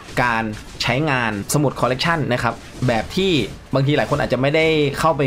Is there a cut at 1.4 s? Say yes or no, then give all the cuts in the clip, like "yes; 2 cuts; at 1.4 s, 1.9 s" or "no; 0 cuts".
yes; 1 cut; at 1.4 s